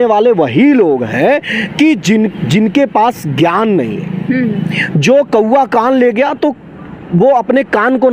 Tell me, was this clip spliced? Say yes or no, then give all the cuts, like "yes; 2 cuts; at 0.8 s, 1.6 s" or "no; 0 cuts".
no; 0 cuts